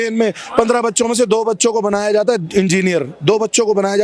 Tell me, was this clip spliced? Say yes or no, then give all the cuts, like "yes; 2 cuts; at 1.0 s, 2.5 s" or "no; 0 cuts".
no; 0 cuts